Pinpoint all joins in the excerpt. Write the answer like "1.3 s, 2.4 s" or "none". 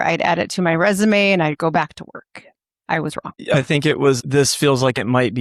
3.4 s, 4.2 s